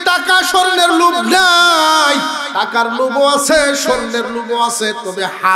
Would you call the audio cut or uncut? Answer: cut